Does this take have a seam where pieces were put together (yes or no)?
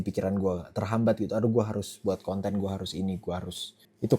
no